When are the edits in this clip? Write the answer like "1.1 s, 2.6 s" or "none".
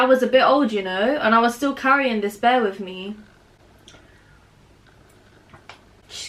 none